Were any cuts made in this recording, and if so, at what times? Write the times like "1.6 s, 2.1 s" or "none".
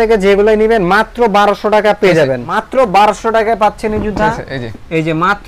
none